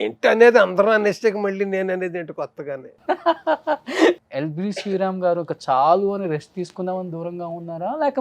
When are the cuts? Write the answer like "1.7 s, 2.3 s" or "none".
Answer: 4.2 s